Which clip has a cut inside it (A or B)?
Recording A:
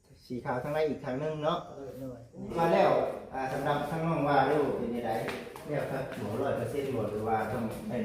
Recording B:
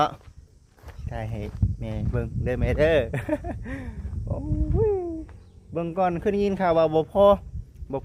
A